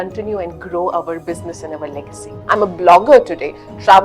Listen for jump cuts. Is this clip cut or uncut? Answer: cut